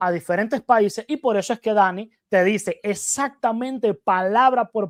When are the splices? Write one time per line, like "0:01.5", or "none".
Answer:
none